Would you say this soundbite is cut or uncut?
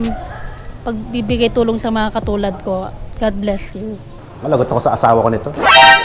cut